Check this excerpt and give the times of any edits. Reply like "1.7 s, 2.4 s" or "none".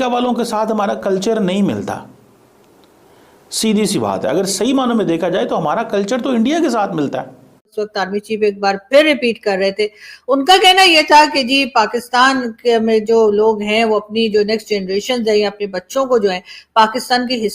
7.7 s